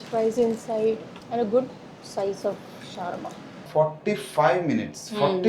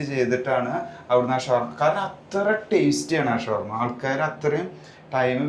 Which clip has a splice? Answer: first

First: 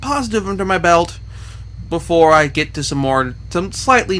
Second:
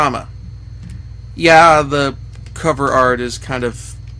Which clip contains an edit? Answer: first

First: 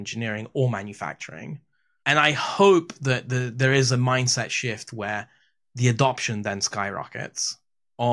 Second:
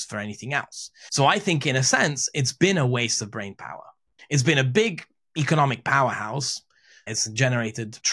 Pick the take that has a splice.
second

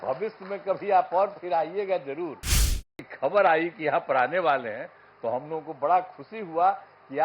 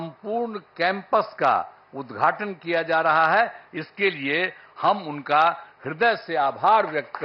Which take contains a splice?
first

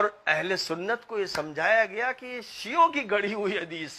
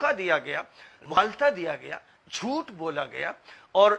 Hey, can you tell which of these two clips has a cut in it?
second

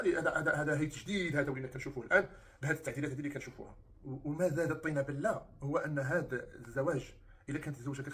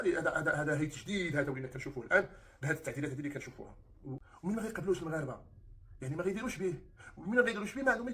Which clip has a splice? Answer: second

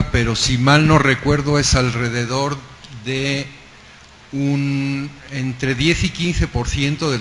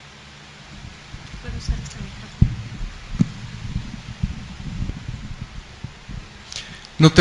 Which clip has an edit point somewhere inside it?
first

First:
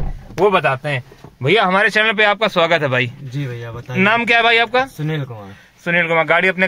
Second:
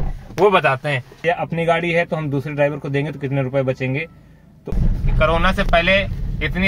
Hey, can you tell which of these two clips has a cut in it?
second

